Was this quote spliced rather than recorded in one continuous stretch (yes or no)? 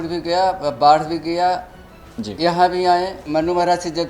yes